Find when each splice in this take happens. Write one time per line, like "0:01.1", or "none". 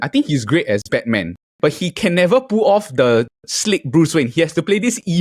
0:01.4